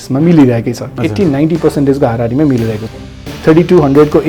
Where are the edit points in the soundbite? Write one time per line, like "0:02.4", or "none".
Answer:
0:03.3

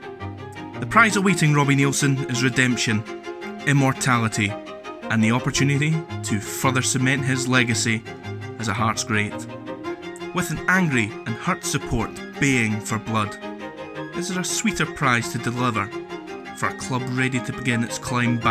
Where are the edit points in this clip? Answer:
0:00.9

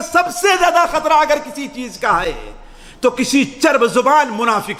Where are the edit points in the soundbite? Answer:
none

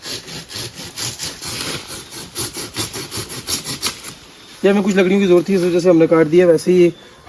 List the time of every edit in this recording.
none

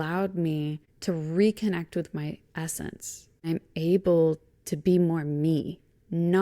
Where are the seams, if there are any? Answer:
0:03.5

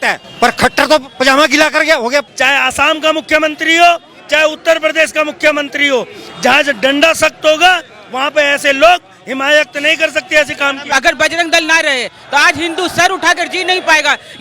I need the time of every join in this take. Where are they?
0:02.3
0:10.9

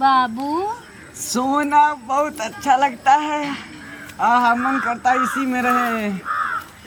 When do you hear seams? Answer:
none

